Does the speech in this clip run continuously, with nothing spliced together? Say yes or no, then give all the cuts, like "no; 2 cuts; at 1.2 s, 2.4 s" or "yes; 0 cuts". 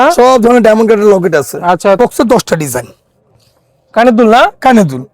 no; 1 cut; at 2.0 s